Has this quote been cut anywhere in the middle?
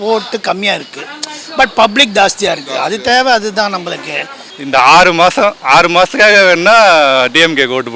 yes; 1 cut; at 4.6 s

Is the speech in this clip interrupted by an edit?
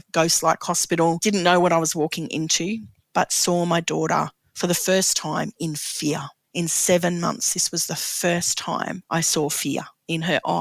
yes; 4 cuts; at 1.2 s, 3.0 s, 6.4 s, 9.0 s

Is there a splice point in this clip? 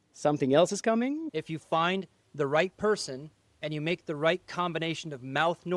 yes; 1 cut; at 1.2 s

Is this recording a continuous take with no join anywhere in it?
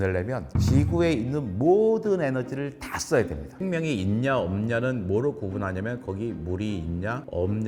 no; 1 cut; at 3.5 s

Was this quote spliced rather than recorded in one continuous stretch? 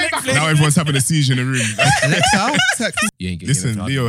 yes; 1 cut; at 3.1 s

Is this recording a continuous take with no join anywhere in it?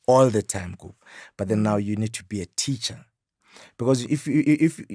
yes; 0 cuts

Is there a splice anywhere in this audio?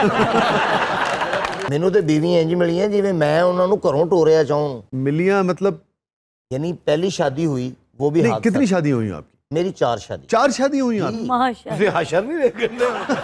yes; 1 cut; at 1.6 s

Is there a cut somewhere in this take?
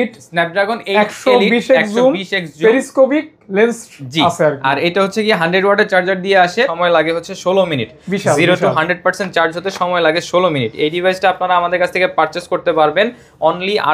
yes; 1 cut; at 6.7 s

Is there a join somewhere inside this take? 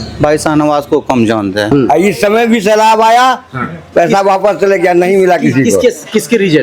yes; 1 cut; at 1.7 s

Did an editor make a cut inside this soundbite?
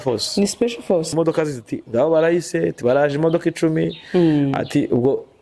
yes; 1 cut; at 1.1 s

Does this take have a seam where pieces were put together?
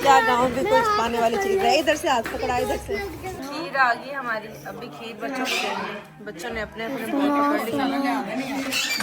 yes; 1 cut; at 3.3 s

